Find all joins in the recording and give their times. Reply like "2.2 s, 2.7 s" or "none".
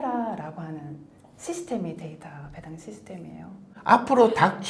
3.7 s